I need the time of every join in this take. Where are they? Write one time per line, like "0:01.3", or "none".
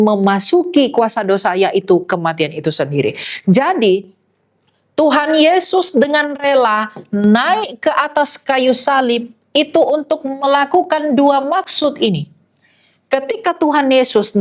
none